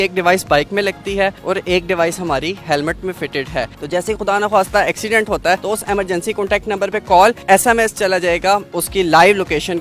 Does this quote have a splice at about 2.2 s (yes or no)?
no